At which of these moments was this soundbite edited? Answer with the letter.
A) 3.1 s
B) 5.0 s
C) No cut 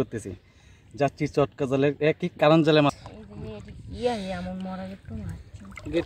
A